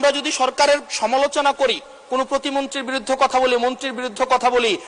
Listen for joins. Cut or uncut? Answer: uncut